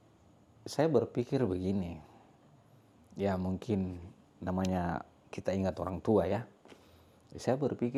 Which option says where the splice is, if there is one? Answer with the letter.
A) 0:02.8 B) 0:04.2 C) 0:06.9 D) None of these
D